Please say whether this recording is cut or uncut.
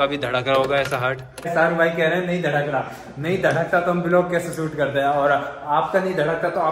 cut